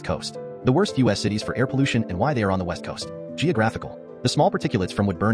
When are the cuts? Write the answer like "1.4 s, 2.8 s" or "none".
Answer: none

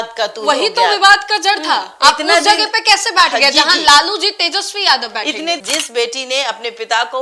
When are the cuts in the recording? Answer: 5.6 s

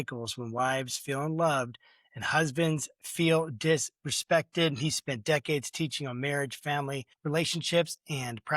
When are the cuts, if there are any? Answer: 7.1 s

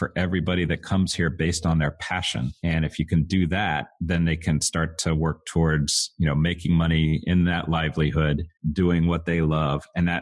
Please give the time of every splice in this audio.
2.5 s, 3.9 s, 8.5 s

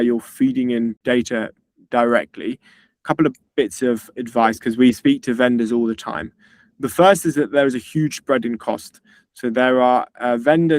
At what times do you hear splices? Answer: 1.0 s

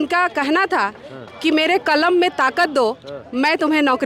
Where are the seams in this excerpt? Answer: none

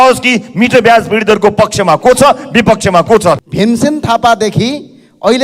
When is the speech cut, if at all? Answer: 3.4 s

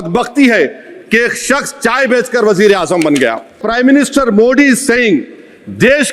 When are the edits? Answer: 3.6 s

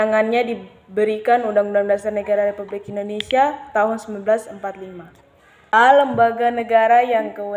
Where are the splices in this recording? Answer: 5.7 s

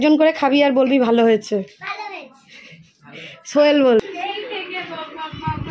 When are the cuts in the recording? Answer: 4.0 s

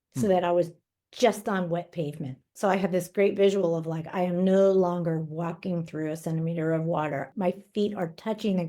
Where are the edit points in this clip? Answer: 2.5 s, 7.3 s

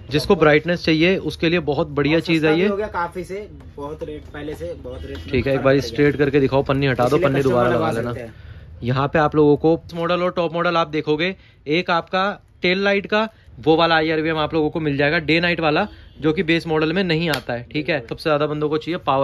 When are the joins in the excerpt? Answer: 9.9 s, 13.4 s, 18.1 s

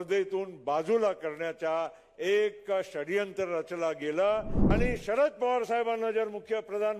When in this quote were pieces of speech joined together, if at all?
4.6 s

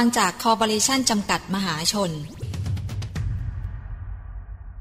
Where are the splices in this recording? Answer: 2.5 s

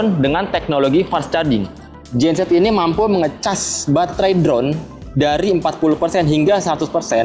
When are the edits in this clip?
none

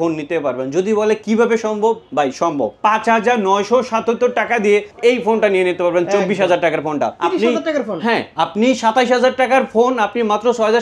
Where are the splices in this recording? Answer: 2.7 s, 4.9 s, 7.1 s

